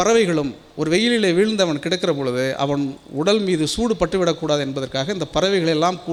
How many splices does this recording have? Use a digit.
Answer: 0